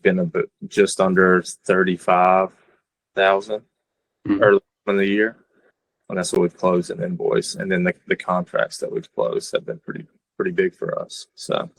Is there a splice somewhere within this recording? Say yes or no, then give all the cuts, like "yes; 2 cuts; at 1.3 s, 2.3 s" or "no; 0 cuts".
no; 0 cuts